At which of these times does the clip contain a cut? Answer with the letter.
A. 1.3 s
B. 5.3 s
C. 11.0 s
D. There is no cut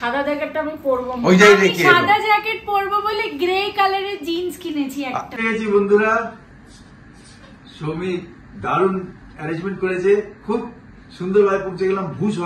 B